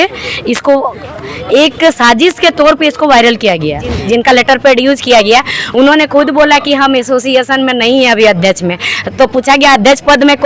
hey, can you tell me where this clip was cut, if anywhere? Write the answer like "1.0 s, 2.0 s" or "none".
3.9 s